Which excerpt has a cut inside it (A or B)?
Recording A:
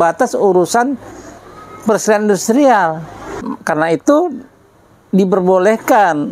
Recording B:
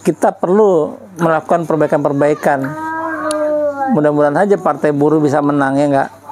A